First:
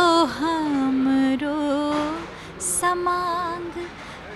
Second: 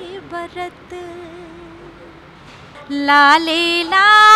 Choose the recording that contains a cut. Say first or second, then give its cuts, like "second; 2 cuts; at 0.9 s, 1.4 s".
second; 1 cut; at 2.7 s